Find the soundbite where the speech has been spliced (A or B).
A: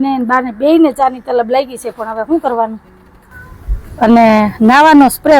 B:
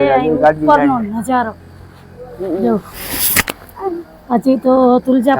A